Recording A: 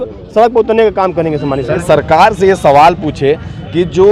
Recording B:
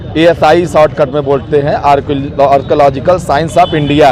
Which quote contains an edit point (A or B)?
A